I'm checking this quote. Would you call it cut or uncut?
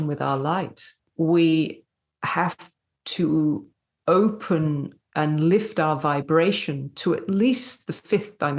cut